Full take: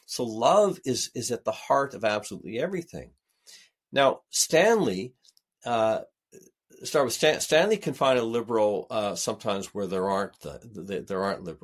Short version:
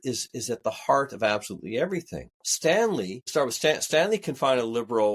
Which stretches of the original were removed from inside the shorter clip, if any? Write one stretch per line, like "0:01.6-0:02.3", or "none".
0:03.2-0:04.3
0:05.1-0:06.8